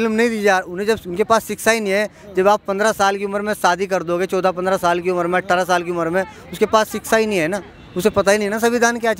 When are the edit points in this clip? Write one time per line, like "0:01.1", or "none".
none